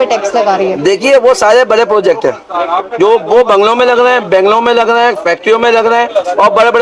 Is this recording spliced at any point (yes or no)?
yes